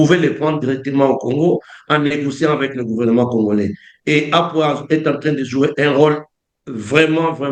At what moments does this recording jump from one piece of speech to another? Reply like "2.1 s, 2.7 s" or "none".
none